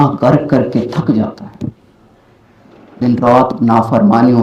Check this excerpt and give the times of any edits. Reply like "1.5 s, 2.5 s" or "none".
none